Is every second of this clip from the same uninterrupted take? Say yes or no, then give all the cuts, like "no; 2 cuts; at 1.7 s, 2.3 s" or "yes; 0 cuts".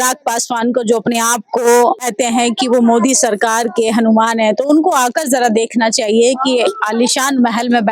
no; 1 cut; at 2.0 s